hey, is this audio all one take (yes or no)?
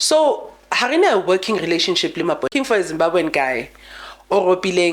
no